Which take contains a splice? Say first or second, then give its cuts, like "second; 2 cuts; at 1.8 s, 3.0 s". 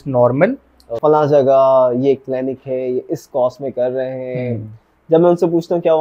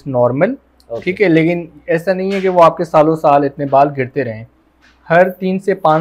first; 1 cut; at 0.9 s